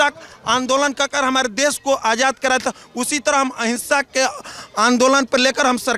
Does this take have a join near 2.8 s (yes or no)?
no